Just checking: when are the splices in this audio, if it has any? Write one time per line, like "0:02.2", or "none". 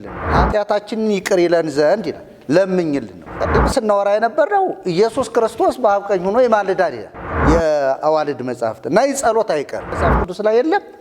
0:03.4
0:07.3
0:10.1